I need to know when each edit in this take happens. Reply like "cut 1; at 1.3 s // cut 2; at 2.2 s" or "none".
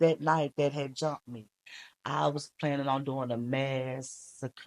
cut 1; at 1.5 s